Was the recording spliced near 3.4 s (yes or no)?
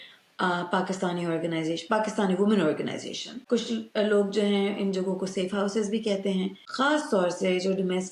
yes